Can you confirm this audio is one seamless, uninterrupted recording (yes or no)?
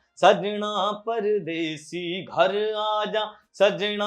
yes